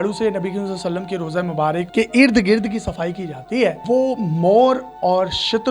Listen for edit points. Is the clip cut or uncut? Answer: cut